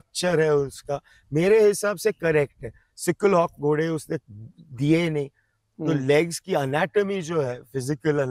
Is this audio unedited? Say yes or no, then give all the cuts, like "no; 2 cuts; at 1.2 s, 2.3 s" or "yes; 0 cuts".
yes; 0 cuts